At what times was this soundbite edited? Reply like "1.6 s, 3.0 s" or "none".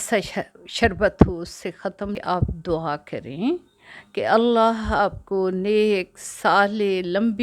2.2 s